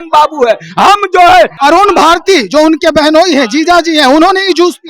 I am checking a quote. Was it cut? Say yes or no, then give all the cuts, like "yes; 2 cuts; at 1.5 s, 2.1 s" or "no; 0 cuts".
yes; 1 cut; at 1.5 s